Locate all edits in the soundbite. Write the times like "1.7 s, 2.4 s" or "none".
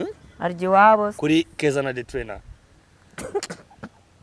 1.1 s